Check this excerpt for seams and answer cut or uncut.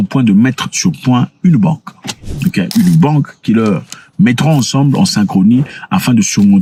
uncut